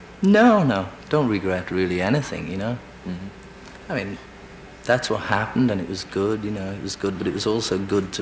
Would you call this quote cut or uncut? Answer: uncut